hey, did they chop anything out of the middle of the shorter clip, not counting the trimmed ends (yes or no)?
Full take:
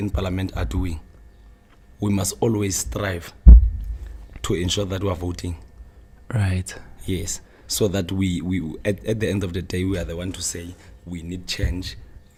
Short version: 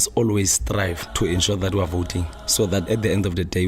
yes